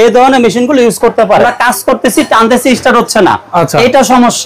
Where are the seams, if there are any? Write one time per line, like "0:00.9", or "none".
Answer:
0:01.5